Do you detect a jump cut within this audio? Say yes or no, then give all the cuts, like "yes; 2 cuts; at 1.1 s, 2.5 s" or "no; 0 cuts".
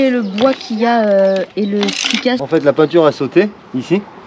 yes; 1 cut; at 2.4 s